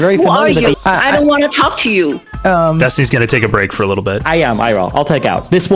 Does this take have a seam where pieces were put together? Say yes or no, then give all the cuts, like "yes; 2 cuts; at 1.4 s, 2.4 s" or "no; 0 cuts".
yes; 3 cuts; at 0.7 s, 2.3 s, 4.2 s